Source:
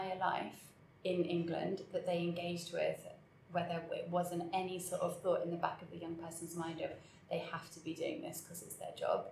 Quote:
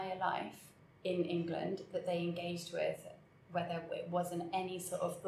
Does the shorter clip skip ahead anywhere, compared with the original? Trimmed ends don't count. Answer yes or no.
no